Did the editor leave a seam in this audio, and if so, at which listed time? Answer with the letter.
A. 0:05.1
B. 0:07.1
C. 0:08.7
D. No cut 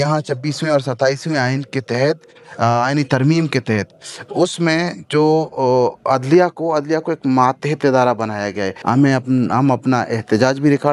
C